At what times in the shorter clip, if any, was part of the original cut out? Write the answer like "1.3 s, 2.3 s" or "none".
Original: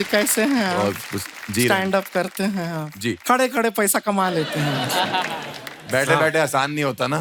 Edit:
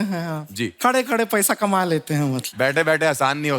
2.4 s